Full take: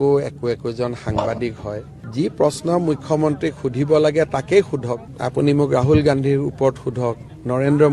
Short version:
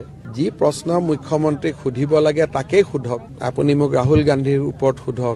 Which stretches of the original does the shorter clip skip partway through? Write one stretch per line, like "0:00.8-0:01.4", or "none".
none